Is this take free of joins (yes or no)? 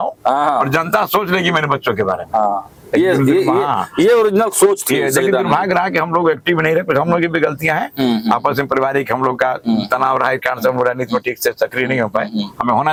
yes